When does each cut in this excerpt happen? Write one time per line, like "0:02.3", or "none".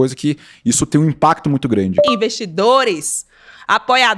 0:02.1